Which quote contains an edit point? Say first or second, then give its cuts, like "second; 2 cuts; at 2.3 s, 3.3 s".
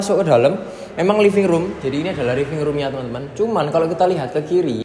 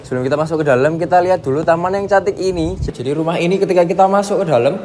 second; 1 cut; at 2.8 s